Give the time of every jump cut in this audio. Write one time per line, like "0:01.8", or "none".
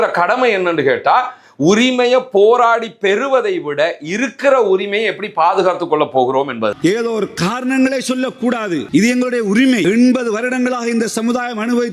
0:06.8
0:08.8
0:09.8